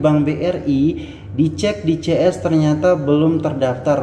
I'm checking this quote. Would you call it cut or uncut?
uncut